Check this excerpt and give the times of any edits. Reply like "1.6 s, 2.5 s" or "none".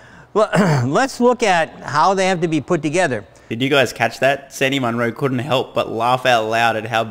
none